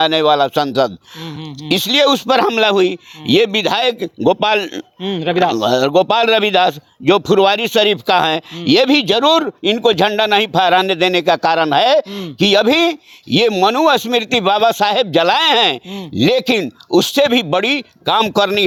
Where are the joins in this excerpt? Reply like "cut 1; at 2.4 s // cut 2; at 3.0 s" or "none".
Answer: none